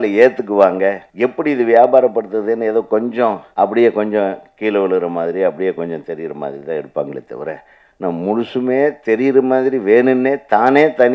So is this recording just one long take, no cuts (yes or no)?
no